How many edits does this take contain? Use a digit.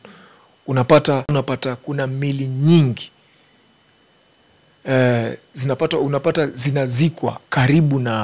1